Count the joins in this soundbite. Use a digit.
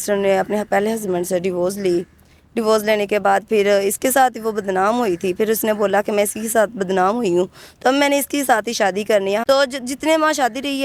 1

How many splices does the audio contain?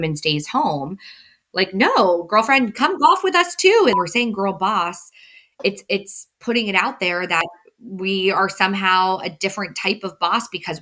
2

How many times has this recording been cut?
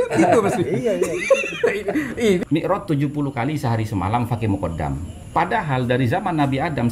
2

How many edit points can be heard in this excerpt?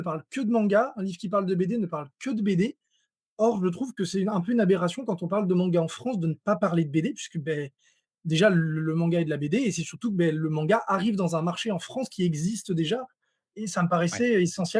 0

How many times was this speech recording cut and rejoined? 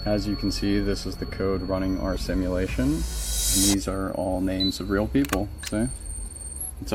0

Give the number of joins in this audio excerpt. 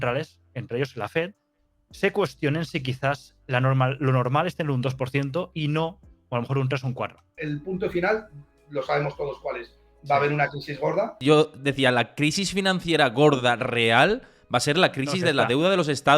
2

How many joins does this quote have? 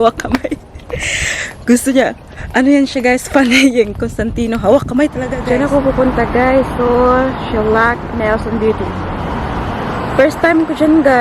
1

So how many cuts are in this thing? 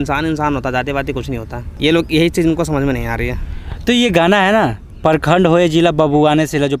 0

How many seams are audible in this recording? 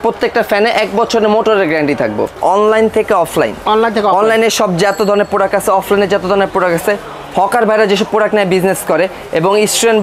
1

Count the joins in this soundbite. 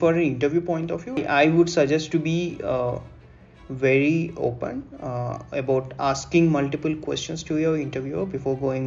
1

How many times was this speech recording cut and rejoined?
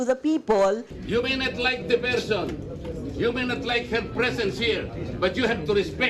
1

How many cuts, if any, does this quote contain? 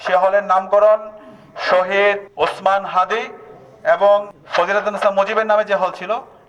2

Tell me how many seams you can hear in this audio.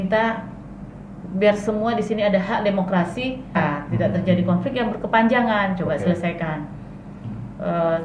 1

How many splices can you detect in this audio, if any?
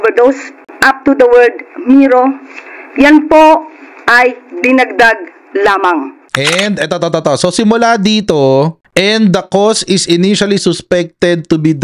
1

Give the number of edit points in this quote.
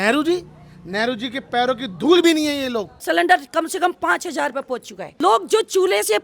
2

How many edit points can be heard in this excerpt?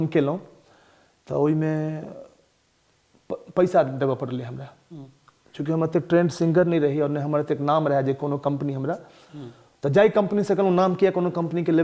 0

